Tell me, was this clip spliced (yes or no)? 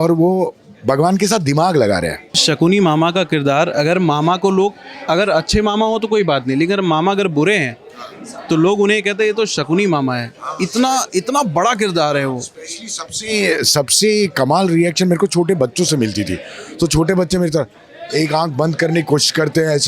yes